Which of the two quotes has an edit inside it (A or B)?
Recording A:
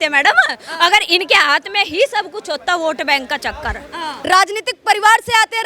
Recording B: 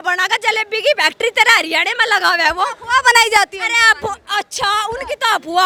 A